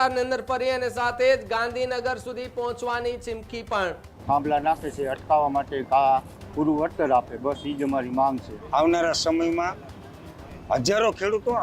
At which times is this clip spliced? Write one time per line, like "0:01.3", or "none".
0:04.1
0:08.5